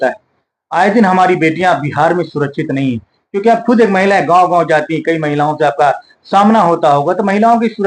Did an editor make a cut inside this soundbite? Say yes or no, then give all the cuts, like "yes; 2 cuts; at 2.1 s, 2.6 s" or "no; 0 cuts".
no; 0 cuts